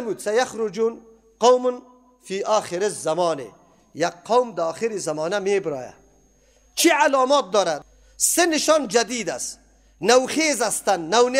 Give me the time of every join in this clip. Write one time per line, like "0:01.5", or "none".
0:07.8

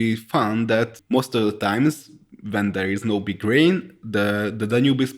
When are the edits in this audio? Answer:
0:01.0

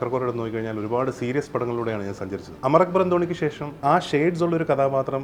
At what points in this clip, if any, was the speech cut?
0:03.8

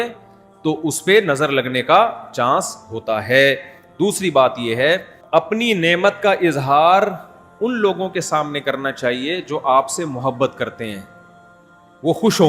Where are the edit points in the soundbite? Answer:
0:05.4

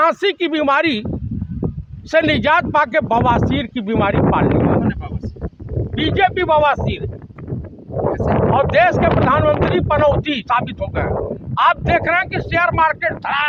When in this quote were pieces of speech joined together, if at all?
none

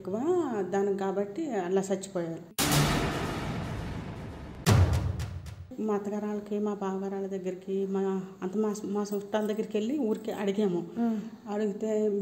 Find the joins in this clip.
0:05.7

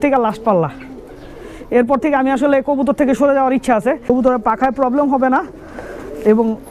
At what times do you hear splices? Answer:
0:04.1

